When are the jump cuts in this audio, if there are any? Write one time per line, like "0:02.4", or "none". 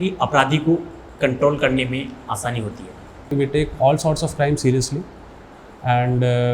0:03.3